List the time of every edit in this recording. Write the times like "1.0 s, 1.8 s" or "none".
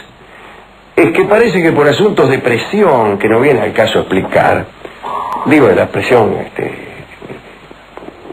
5.4 s

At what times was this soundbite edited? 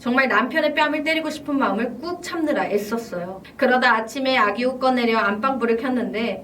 3.4 s

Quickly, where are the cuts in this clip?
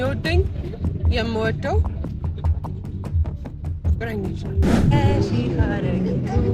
4.9 s

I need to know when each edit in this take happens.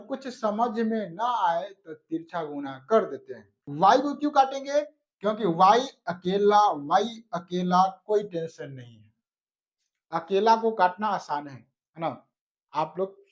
3.6 s

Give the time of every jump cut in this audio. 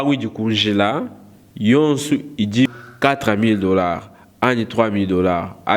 2.7 s

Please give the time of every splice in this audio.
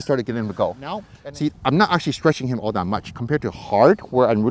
1.1 s

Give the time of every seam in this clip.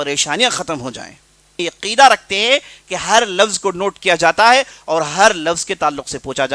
1.6 s

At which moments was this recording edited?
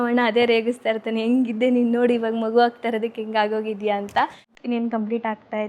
4.5 s

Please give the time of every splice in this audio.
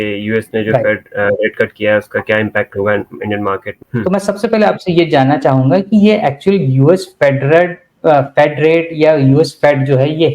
3.7 s

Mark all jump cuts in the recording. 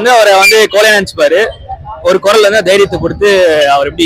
none

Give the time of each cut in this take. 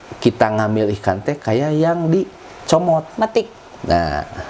none

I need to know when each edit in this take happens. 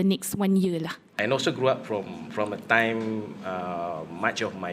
1.2 s

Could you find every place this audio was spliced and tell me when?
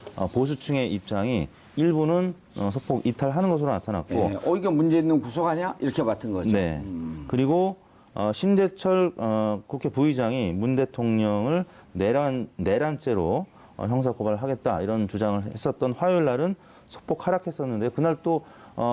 2.5 s

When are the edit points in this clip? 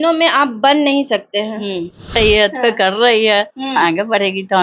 2.2 s

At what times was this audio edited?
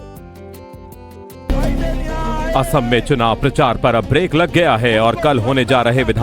1.3 s

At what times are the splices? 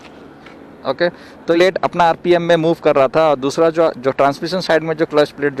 1.6 s

